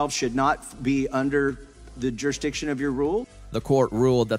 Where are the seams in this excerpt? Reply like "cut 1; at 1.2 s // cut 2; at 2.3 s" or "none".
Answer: none